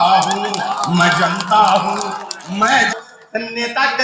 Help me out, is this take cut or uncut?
cut